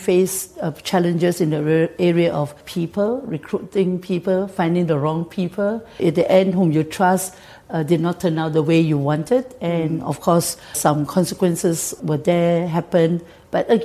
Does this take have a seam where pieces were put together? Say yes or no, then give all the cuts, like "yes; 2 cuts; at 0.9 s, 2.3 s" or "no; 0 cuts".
yes; 4 cuts; at 2.6 s, 5.9 s, 10.8 s, 12.0 s